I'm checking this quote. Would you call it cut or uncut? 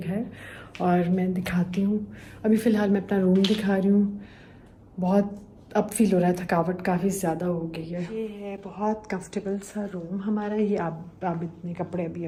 uncut